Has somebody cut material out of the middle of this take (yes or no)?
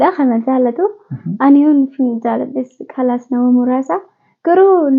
no